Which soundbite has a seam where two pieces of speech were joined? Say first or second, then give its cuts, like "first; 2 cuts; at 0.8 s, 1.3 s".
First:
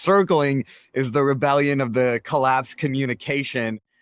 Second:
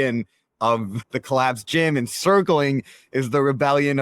second; 1 cut; at 1.0 s